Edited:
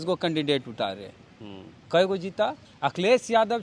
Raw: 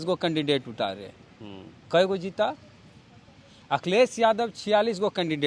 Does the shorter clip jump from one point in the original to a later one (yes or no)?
yes